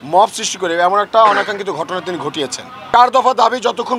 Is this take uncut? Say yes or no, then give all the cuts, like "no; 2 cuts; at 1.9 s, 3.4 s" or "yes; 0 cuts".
no; 1 cut; at 2.9 s